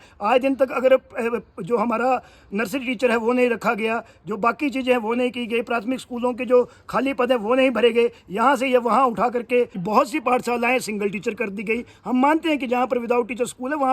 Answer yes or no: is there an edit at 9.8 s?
yes